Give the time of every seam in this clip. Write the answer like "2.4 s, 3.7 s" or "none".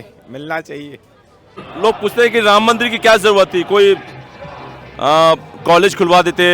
1.7 s